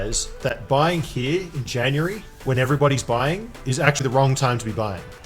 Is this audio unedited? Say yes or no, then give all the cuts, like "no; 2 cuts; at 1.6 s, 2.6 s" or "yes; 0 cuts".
yes; 0 cuts